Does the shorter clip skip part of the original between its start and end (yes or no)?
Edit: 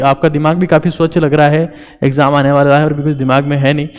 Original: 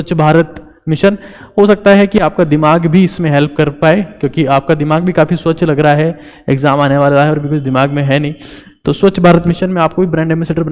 no